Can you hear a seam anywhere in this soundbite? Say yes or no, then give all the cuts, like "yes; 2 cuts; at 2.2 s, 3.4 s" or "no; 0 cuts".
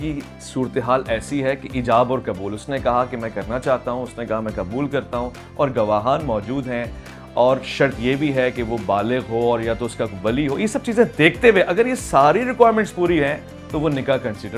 no; 0 cuts